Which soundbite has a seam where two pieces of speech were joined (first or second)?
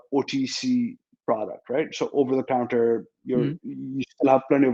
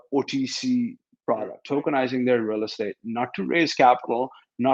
second